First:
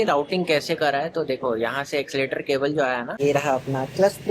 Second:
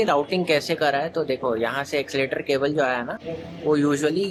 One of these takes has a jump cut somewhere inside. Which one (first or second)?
first